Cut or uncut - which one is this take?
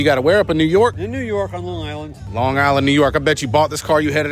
cut